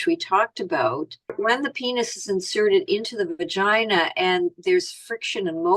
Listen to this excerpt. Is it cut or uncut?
cut